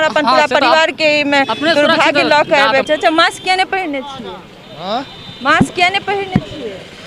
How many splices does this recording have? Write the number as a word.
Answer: one